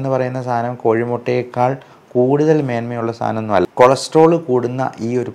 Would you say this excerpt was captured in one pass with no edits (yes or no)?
no